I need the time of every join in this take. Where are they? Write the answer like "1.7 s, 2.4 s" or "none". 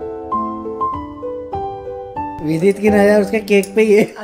2.4 s